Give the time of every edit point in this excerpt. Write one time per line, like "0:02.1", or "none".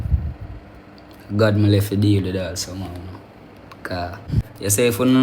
0:04.3